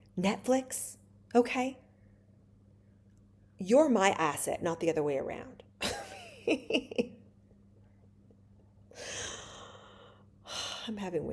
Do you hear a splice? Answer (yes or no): no